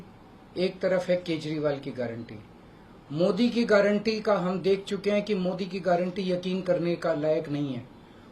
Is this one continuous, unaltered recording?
yes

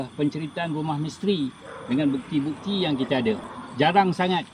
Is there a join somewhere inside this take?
yes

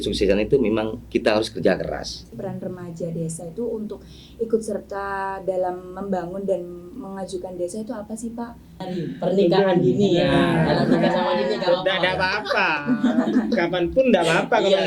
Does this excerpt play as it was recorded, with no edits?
no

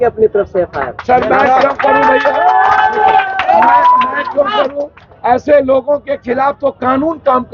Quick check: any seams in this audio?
no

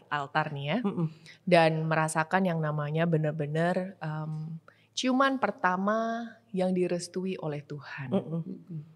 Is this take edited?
no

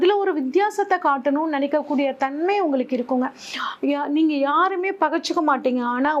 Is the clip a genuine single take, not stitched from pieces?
no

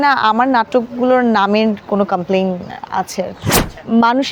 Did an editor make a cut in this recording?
no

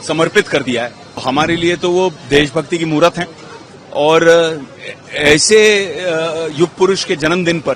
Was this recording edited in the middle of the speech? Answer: yes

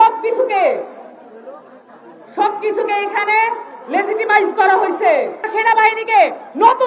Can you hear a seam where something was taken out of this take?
yes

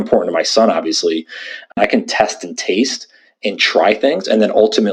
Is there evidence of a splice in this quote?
yes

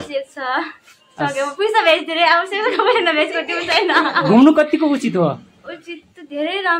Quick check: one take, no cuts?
yes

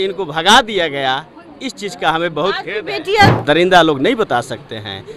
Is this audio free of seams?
no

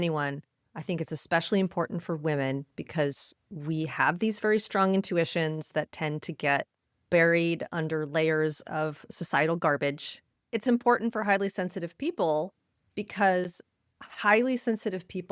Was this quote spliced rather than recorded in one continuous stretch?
yes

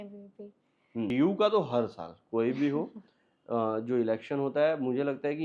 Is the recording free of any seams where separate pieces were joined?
no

